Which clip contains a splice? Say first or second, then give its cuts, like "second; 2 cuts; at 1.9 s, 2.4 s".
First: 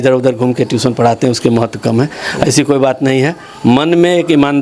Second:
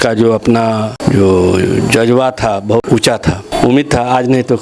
second; 2 cuts; at 0.9 s, 3.0 s